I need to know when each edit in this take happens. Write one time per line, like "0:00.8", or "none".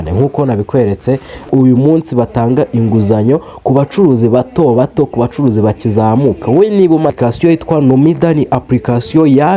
0:01.5
0:07.1